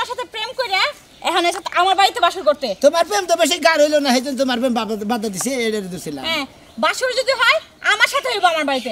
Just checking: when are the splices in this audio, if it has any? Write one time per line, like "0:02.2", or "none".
none